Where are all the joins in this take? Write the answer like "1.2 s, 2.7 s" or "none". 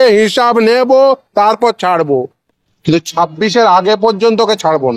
2.3 s